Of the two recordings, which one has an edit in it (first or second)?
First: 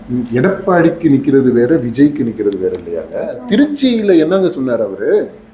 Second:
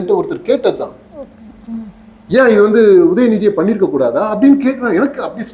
first